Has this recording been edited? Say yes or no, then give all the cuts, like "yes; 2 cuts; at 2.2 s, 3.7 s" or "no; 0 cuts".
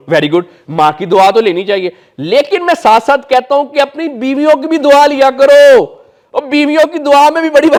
no; 0 cuts